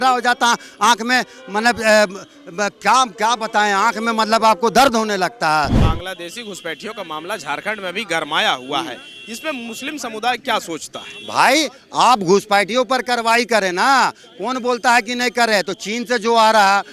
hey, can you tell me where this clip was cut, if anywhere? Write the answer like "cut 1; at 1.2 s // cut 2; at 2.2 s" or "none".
cut 1; at 5.8 s